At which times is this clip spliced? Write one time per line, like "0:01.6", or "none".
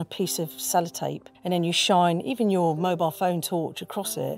0:01.3